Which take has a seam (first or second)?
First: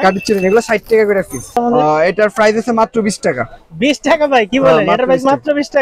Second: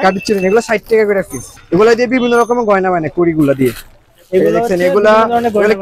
first